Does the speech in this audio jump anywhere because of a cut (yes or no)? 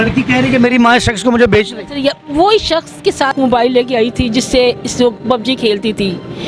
yes